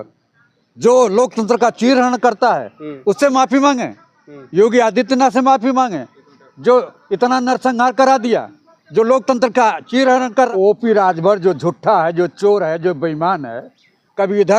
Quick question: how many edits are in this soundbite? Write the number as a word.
one